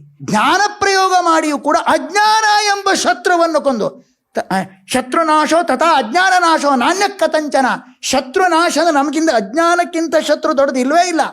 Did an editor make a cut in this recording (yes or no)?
no